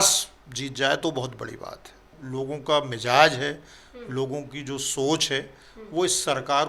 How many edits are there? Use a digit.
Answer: 1